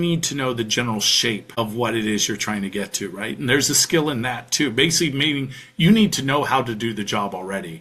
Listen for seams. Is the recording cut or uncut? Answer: cut